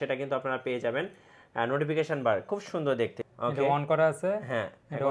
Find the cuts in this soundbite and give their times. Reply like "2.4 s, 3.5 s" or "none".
3.2 s